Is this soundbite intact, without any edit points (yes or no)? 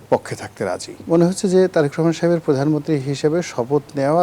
no